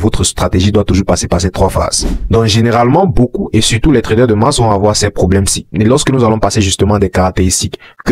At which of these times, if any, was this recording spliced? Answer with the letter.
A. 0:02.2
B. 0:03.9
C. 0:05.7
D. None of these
A